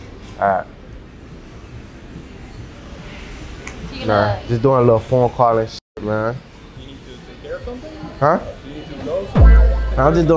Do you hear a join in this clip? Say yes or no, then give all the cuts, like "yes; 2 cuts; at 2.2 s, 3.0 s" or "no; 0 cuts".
no; 0 cuts